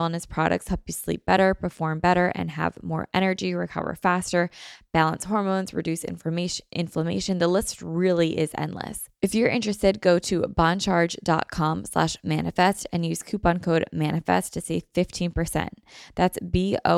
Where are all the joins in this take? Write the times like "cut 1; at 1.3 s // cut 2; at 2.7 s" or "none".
cut 1; at 9.0 s